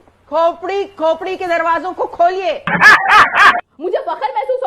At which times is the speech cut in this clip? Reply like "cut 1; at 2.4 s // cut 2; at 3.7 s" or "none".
cut 1; at 3.6 s